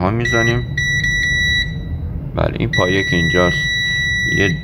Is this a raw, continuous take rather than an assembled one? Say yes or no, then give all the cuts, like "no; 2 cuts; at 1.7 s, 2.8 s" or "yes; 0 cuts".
yes; 0 cuts